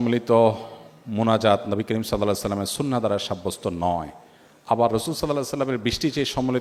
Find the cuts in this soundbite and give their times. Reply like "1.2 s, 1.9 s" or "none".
none